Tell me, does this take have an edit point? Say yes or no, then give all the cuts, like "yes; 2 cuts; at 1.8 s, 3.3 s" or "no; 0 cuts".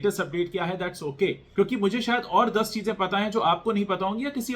yes; 1 cut; at 1.4 s